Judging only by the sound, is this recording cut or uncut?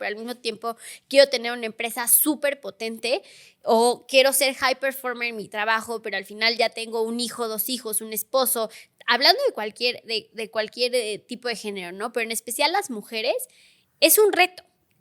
uncut